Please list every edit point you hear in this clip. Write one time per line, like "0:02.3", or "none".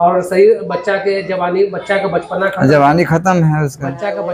none

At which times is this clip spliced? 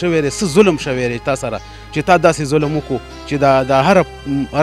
none

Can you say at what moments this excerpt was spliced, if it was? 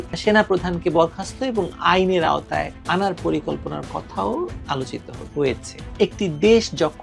0:05.8

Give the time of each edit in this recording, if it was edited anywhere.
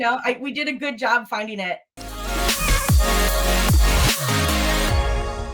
0:01.9

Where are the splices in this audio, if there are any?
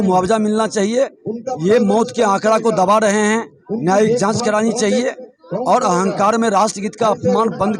none

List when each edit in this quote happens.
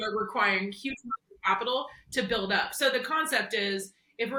none

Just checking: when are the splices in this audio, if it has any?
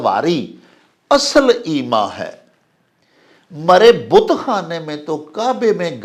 none

